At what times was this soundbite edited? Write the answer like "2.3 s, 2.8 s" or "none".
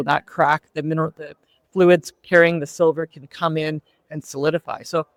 none